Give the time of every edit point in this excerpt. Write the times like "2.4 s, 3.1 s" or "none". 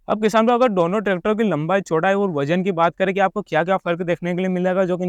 none